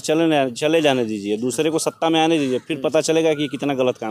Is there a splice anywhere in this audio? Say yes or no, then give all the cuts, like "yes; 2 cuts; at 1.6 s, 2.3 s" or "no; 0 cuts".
no; 0 cuts